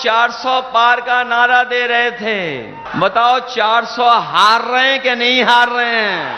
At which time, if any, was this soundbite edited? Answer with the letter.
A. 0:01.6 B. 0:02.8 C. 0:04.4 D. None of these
B